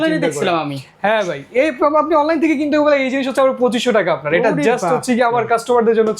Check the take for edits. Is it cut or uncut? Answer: uncut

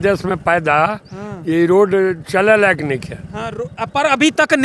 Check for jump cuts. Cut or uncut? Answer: uncut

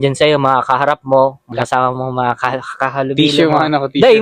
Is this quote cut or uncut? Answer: cut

